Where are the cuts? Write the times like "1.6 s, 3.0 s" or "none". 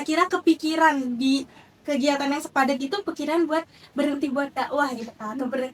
none